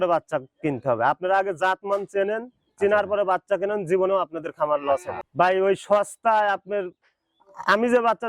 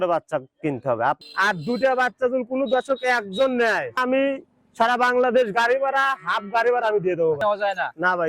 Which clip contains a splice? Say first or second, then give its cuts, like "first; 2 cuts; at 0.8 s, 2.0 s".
second; 3 cuts; at 1.2 s, 4.0 s, 7.4 s